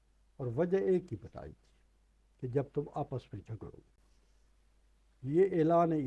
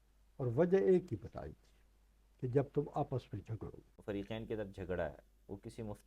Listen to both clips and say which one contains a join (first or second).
second